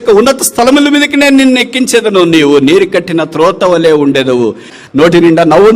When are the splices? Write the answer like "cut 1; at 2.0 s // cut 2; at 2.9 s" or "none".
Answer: cut 1; at 4.7 s